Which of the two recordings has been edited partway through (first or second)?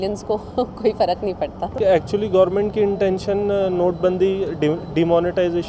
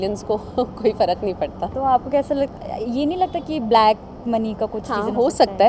first